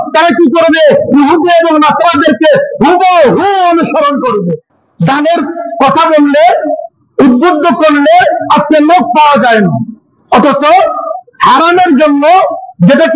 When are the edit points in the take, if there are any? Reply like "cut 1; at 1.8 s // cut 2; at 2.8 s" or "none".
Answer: cut 1; at 4.6 s